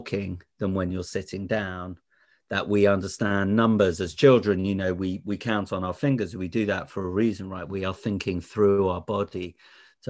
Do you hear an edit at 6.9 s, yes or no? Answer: no